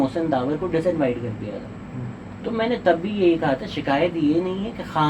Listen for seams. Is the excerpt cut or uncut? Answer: uncut